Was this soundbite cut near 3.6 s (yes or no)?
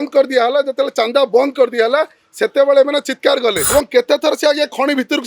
yes